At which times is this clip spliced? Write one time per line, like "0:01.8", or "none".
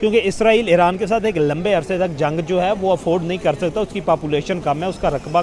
none